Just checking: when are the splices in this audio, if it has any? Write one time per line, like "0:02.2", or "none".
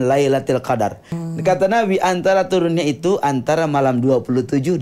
0:01.1